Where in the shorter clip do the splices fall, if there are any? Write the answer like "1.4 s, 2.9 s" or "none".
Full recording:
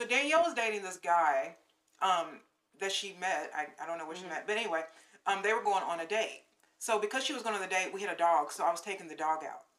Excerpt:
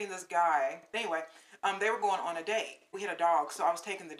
1.2 s, 3.0 s